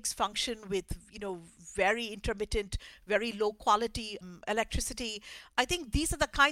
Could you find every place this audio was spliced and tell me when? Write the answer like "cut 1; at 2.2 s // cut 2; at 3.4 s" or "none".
none